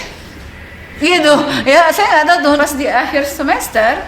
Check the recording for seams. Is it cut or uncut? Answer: cut